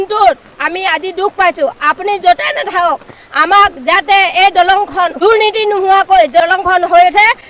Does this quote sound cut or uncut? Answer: cut